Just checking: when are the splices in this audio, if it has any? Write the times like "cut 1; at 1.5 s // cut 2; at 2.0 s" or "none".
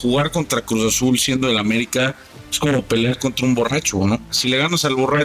cut 1; at 4.3 s